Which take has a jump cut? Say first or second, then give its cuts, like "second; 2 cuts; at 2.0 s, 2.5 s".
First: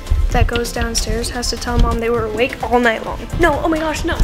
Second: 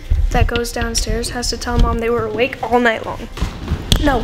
first; 1 cut; at 3.3 s